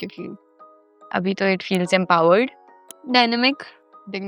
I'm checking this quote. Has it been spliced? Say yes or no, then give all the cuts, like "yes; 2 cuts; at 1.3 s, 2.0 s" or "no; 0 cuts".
no; 0 cuts